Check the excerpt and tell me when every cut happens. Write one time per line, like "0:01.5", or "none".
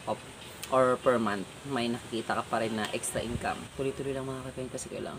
0:03.7

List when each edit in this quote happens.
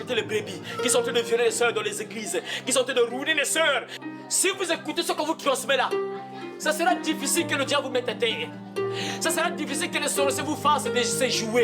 0:03.9

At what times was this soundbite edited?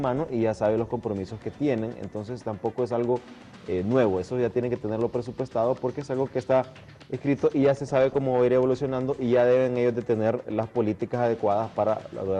0:03.3

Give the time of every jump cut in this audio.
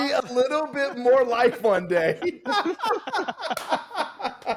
none

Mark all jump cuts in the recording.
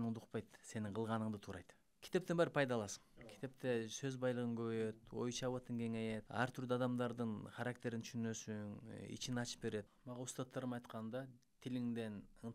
0:02.0
0:06.3
0:10.0

